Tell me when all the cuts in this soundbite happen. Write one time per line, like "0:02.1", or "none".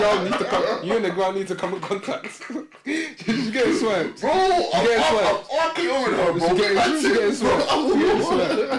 none